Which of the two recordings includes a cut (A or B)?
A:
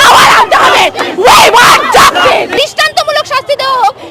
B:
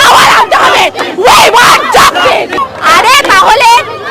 A